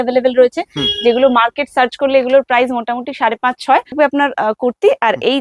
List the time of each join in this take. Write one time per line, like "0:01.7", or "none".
0:03.9

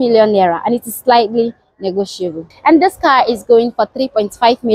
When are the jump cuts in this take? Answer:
0:02.5

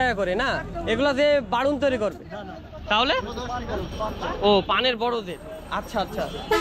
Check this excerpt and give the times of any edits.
none

